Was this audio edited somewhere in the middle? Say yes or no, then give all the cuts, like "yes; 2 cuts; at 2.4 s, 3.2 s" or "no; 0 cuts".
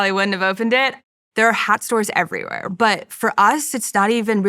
yes; 2 cuts; at 1.0 s, 2.6 s